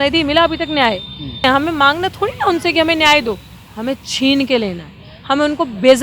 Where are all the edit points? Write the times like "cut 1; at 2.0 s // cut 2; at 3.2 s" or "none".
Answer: cut 1; at 1.4 s